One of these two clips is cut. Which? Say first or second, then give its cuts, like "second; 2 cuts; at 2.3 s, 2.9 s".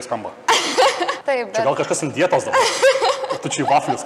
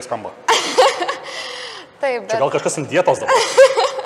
first; 1 cut; at 1.2 s